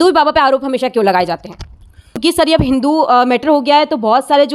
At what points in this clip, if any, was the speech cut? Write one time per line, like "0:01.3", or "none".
0:02.2